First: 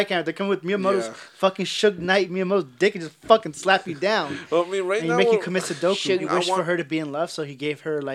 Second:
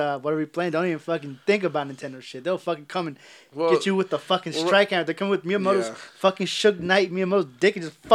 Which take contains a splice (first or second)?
first